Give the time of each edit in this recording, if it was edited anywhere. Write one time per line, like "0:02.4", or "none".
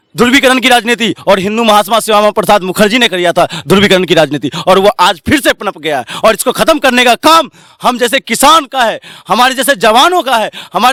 none